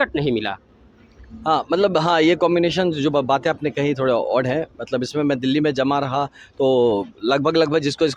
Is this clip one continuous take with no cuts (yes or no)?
yes